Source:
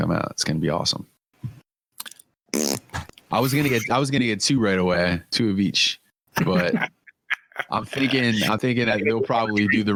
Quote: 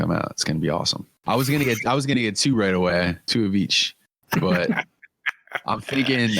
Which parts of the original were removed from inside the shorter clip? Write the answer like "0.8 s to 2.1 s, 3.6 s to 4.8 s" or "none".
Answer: 1.0 s to 3.1 s